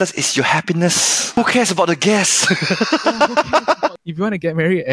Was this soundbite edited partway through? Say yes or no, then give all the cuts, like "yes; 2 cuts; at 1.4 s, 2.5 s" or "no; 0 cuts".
yes; 2 cuts; at 1.1 s, 4.0 s